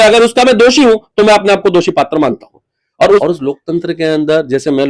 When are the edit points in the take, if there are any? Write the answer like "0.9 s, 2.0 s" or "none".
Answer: 3.2 s